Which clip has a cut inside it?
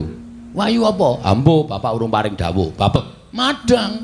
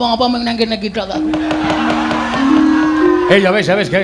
first; 1 cut; at 3.0 s

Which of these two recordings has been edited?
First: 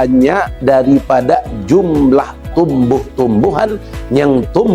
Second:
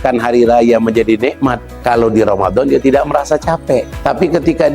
second; 2 cuts; at 1.7 s, 3.9 s

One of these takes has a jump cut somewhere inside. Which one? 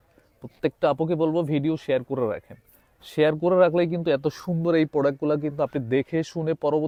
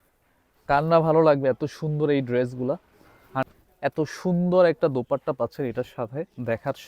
second; 1 cut; at 3.5 s

